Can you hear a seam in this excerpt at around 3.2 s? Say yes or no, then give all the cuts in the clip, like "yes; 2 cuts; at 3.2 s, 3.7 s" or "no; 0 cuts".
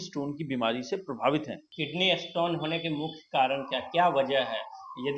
no; 1 cut; at 1.7 s